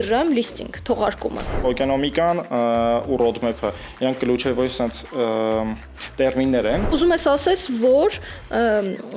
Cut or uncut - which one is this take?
cut